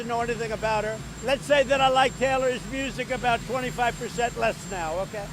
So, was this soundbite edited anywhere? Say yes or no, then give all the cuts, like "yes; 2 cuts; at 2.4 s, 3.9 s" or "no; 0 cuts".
yes; 1 cut; at 1.1 s